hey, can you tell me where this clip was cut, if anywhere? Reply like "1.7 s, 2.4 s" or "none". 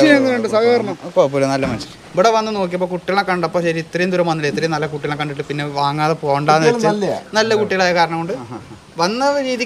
1.8 s